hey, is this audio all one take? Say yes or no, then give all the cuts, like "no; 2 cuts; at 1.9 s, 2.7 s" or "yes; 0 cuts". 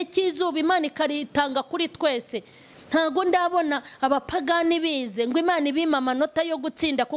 yes; 0 cuts